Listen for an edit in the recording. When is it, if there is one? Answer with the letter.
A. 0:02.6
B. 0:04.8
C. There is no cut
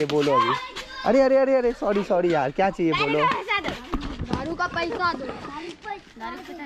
C